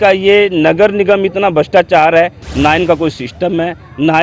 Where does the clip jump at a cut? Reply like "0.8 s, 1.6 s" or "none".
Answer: 2.4 s